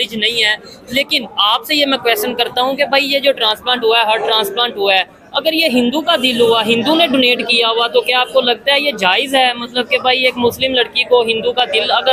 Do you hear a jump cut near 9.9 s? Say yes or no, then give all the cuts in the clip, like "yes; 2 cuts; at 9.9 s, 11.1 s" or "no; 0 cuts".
no; 0 cuts